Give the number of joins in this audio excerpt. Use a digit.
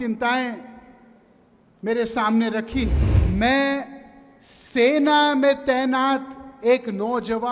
1